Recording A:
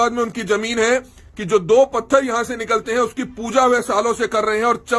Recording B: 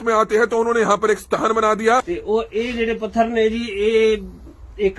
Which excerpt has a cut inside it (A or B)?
B